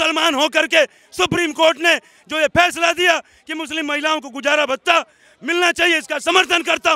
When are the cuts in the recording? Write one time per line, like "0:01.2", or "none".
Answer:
none